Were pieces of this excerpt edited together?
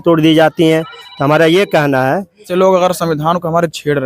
yes; 1 cut; at 2.5 s

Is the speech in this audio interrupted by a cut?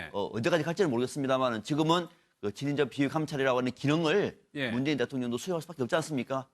yes; 1 cut; at 4.4 s

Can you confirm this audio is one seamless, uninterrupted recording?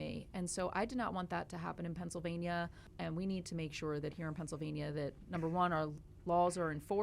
no; 1 cut; at 2.9 s

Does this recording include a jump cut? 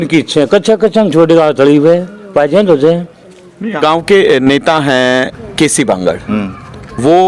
yes; 1 cut; at 3.8 s

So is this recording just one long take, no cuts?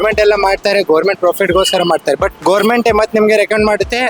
no; 1 cut; at 2.3 s

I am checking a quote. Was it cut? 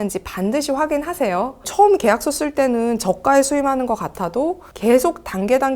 yes; 1 cut; at 1.7 s

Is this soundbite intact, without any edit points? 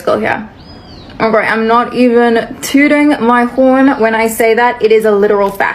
yes; 0 cuts

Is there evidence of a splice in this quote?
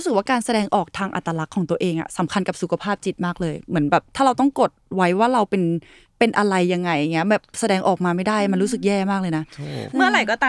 no; 0 cuts

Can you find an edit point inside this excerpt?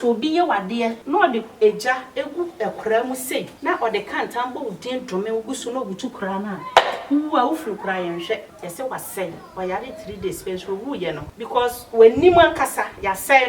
yes; 4 cuts; at 1.0 s, 3.5 s, 8.5 s, 11.3 s

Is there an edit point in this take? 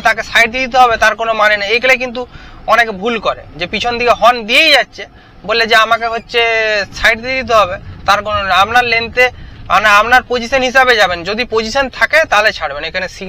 no; 0 cuts

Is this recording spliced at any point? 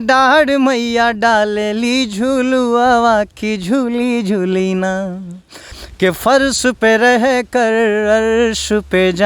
yes; 1 cut; at 5.7 s

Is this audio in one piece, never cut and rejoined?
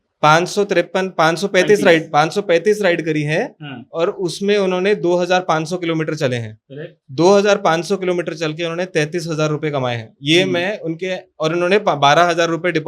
yes; 0 cuts

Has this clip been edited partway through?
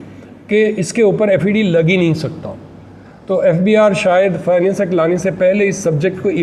no; 0 cuts

